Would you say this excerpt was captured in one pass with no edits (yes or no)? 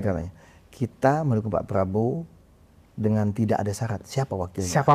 yes